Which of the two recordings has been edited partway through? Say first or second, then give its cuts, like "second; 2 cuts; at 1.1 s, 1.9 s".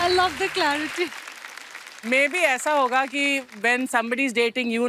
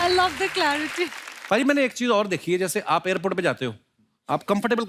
second; 1 cut; at 1.3 s